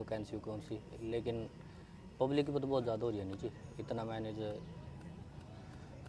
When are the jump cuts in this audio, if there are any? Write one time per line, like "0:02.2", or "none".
none